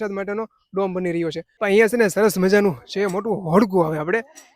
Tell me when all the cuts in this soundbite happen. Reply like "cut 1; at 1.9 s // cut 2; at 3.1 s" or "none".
cut 1; at 1.5 s